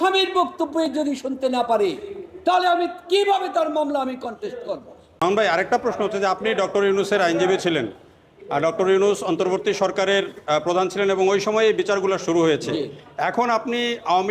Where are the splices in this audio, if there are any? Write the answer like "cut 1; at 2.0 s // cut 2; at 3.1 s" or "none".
cut 1; at 5.2 s

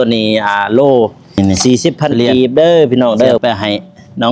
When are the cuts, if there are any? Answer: cut 1; at 3.4 s

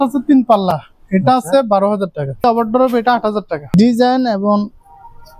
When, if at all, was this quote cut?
cut 1; at 2.4 s // cut 2; at 3.7 s

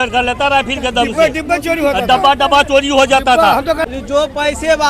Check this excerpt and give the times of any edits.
cut 1; at 3.8 s

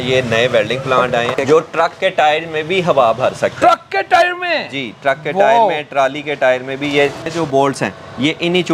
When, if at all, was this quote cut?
cut 1; at 1.3 s // cut 2; at 7.3 s

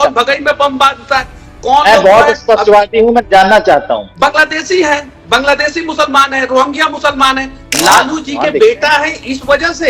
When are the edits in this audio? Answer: cut 1; at 4.1 s // cut 2; at 7.6 s

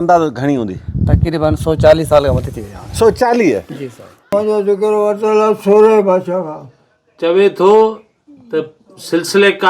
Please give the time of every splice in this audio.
cut 1; at 4.3 s

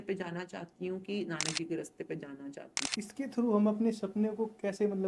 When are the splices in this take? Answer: cut 1; at 2.8 s

